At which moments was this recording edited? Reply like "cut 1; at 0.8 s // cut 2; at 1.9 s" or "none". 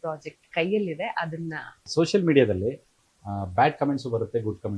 cut 1; at 1.9 s